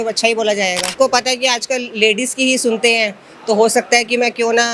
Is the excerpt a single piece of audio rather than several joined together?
no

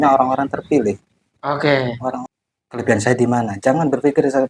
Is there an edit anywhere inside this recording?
yes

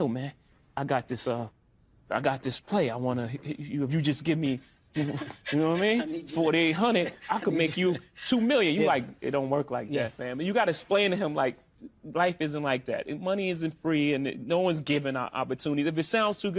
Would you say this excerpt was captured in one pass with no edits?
yes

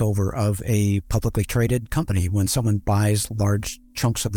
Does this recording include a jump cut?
no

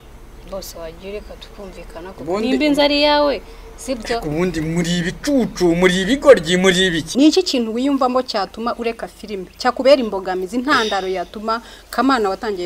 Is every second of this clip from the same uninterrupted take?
no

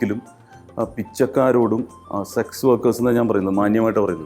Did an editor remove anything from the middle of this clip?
no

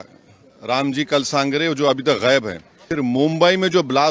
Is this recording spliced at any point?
yes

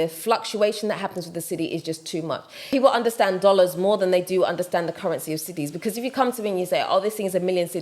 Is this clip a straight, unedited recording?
no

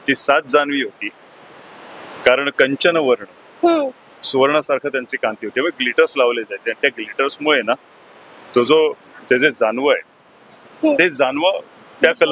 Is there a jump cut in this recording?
no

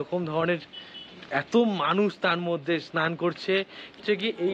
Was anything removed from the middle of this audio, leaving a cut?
no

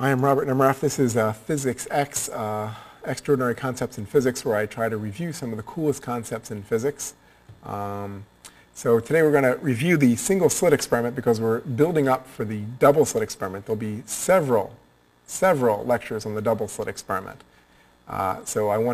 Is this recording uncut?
yes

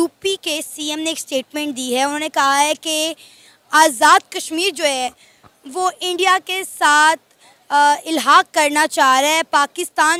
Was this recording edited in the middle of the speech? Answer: no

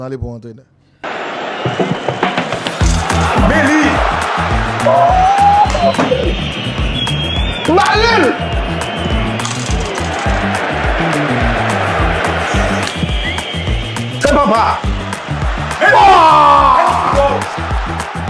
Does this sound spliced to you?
yes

